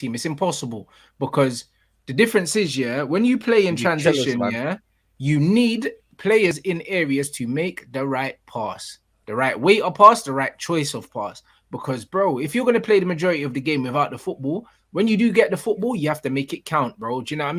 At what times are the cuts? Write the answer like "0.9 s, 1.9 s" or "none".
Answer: none